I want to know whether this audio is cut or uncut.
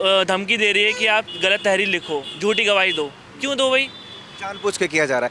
uncut